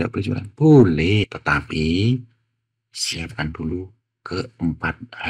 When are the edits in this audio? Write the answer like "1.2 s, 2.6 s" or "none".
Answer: 1.4 s